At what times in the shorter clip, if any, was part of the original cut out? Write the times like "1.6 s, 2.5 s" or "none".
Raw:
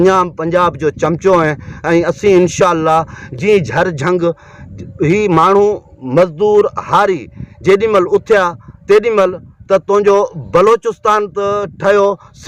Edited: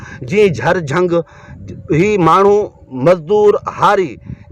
none